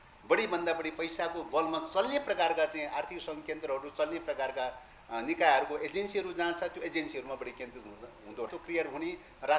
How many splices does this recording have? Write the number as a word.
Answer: one